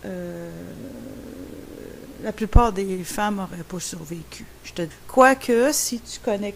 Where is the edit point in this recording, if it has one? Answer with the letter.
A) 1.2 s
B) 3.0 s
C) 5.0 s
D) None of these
D